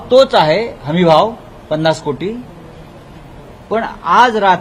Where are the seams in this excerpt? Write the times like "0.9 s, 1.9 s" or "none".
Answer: none